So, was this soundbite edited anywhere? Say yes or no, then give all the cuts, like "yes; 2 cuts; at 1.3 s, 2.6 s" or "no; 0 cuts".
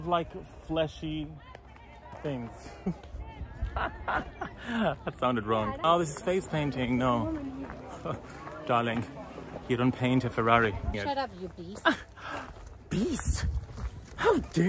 yes; 2 cuts; at 5.8 s, 11.0 s